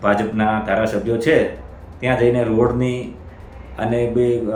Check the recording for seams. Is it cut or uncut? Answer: uncut